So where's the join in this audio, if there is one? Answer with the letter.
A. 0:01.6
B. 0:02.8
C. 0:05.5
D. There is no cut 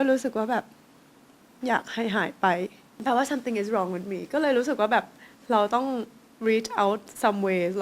B